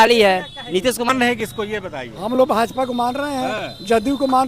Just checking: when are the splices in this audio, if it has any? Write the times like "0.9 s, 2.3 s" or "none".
1.1 s